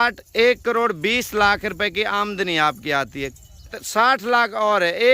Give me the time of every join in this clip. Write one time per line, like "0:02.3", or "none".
0:03.8